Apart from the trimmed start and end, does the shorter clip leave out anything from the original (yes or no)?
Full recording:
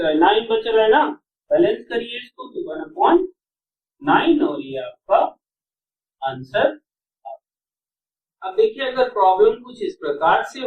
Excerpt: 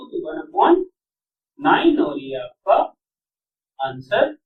no